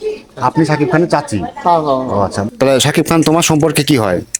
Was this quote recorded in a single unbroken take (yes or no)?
no